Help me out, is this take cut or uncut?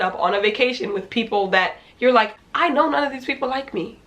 cut